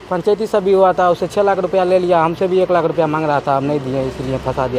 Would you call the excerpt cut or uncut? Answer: uncut